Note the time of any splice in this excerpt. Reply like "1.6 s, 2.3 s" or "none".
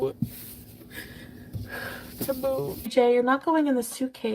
2.9 s